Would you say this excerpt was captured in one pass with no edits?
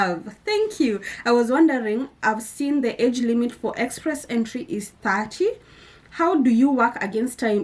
yes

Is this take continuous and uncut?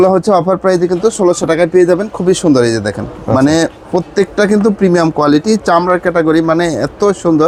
yes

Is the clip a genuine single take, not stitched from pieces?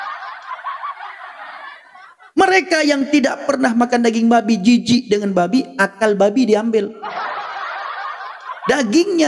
no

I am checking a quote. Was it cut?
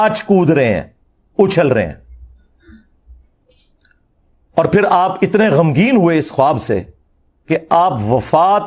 no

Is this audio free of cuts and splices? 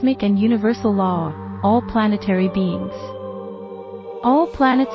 yes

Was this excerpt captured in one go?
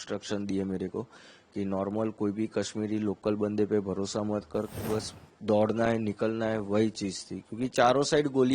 no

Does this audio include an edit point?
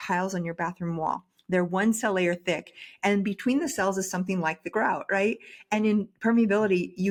no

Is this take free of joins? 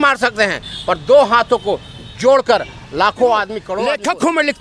no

